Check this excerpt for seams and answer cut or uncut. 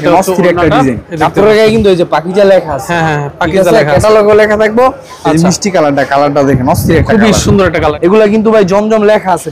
cut